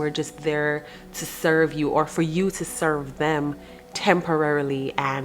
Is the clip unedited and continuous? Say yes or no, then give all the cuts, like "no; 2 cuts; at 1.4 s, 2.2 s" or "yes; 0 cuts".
yes; 0 cuts